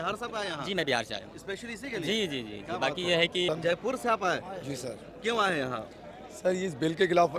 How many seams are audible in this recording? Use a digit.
1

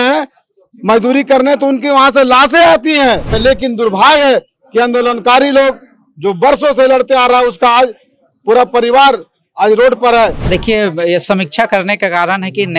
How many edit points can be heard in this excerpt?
2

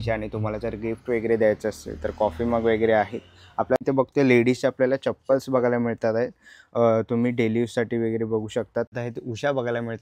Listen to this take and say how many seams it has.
2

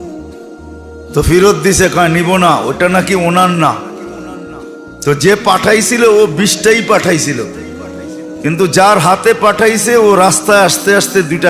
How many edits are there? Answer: 1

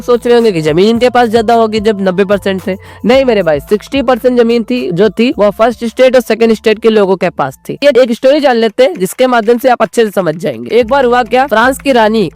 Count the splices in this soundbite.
1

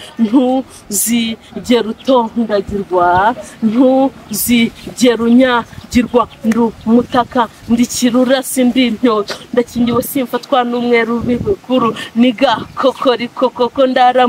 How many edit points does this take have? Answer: 0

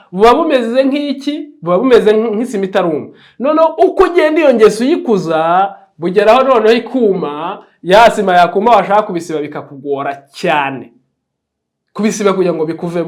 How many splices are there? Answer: 0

